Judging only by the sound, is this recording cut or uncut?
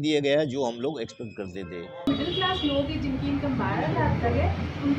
cut